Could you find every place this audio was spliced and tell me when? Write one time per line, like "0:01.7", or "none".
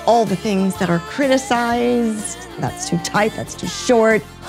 0:02.6